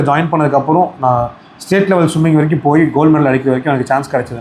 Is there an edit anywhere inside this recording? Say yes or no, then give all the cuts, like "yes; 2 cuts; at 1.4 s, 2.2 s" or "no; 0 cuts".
no; 0 cuts